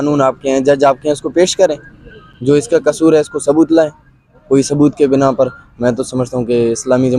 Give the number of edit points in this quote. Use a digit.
0